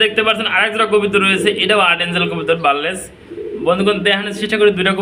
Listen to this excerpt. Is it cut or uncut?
uncut